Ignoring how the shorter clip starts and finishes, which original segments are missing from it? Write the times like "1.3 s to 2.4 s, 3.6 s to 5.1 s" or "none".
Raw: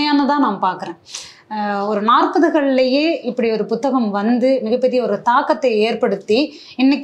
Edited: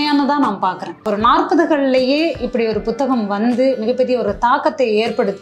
1.0 s to 1.9 s